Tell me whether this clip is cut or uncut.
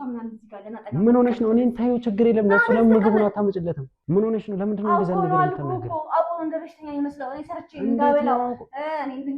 cut